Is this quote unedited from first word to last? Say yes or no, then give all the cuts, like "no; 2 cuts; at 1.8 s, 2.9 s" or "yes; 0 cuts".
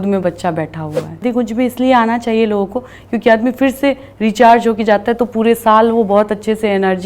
no; 1 cut; at 1.2 s